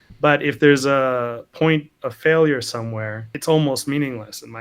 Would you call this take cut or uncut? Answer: cut